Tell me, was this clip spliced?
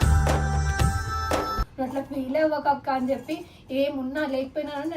yes; 1 cut; at 1.6 s

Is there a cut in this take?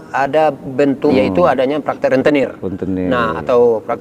yes; 1 cut; at 1.1 s

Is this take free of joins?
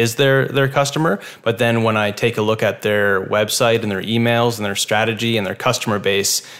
yes; 0 cuts

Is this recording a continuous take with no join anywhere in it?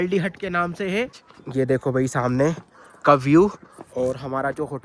no; 1 cut; at 1.3 s

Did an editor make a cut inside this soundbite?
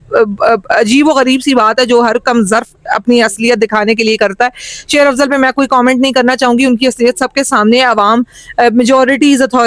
no; 0 cuts

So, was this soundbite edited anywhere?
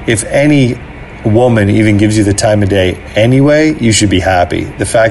no; 0 cuts

